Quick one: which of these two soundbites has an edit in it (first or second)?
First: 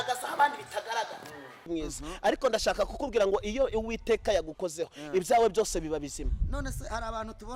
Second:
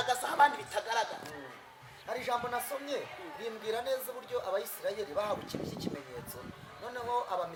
first